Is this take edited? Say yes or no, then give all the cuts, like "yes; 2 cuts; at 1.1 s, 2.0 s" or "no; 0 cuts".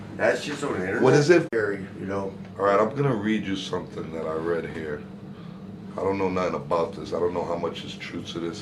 no; 0 cuts